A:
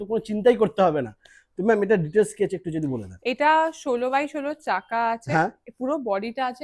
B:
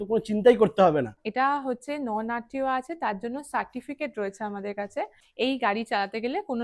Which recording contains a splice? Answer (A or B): B